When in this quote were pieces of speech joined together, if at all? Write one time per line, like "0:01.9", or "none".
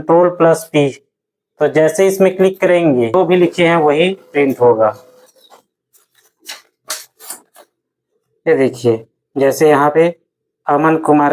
0:03.1

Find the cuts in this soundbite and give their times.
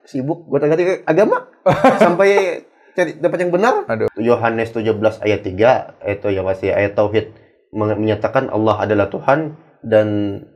0:04.1

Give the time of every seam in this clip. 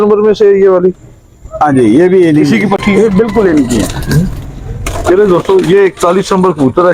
none

